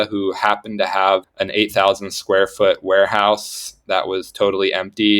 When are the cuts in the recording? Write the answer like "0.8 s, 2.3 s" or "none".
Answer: 1.3 s